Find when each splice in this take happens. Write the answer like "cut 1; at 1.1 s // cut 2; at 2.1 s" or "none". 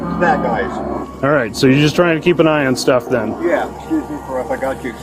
cut 1; at 0.9 s // cut 2; at 3.7 s